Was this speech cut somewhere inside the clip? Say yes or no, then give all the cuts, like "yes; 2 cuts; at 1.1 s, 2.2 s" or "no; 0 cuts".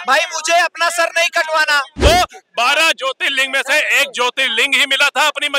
yes; 1 cut; at 1.9 s